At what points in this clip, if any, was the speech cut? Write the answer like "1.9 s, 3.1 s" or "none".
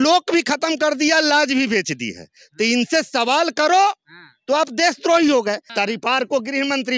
5.7 s